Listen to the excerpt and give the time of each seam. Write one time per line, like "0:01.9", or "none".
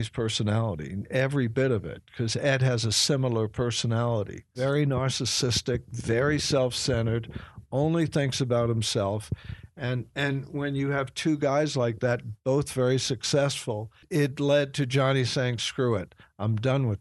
0:04.5
0:14.0